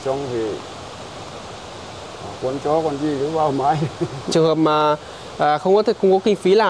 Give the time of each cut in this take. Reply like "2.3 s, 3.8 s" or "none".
4.3 s